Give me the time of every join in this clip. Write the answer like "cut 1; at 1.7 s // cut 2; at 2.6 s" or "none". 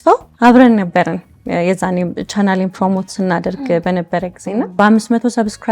cut 1; at 4.7 s